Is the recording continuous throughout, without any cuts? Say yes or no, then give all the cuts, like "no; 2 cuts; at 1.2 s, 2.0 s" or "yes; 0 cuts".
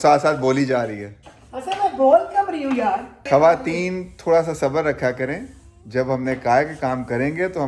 no; 1 cut; at 3.2 s